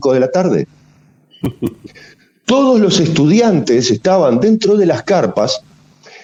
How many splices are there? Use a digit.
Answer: 0